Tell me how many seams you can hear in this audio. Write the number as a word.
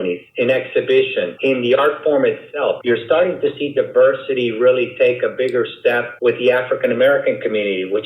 three